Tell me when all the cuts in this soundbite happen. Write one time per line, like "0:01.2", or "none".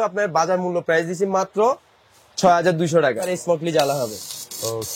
0:03.3